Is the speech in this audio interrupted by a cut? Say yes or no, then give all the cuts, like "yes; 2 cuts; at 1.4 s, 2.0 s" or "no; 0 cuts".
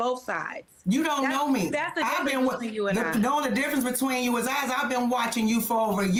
no; 0 cuts